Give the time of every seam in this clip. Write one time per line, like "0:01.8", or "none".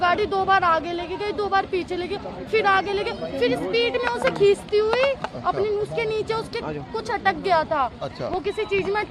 none